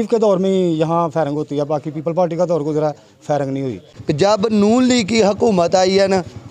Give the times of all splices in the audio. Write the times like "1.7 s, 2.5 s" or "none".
3.9 s